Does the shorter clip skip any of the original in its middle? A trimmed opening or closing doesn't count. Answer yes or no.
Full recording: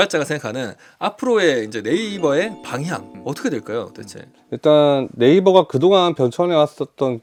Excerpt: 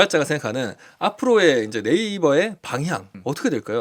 no